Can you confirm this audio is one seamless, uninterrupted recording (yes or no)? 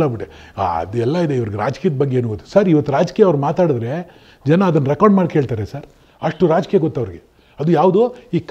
yes